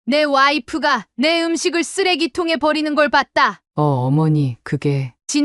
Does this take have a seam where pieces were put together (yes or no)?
yes